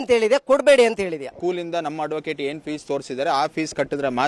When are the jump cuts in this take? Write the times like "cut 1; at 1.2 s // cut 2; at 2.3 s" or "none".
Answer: cut 1; at 1.3 s